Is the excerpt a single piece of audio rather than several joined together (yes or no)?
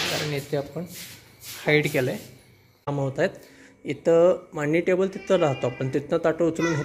no